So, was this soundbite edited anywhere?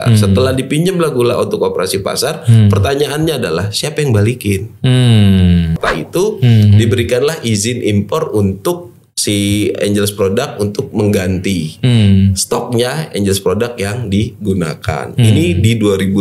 yes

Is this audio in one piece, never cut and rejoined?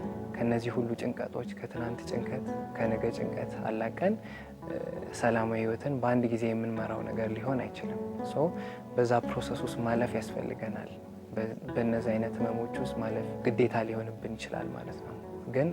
yes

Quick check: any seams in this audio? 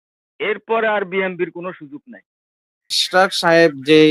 yes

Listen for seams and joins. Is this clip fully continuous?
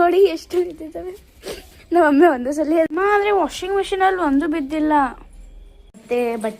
no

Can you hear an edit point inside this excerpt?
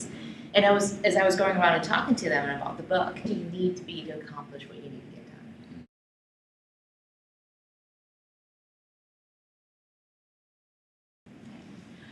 no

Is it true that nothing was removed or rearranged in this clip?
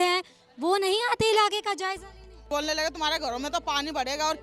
no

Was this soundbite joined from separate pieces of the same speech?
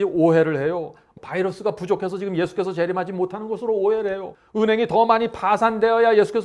yes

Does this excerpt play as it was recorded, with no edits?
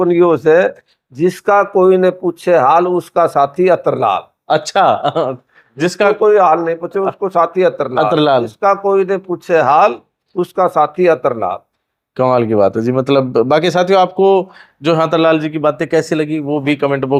yes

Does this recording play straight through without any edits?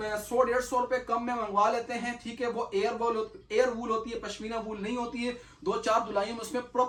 yes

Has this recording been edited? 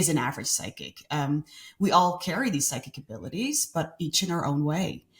no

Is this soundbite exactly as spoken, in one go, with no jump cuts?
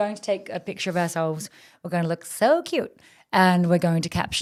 yes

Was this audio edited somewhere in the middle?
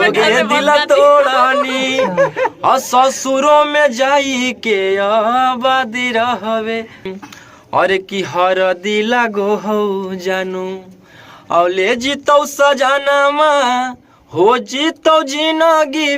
yes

